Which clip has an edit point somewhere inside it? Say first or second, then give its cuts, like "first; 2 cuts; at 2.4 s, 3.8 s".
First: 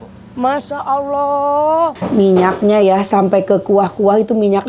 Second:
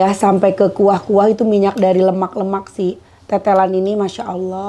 first; 1 cut; at 2.0 s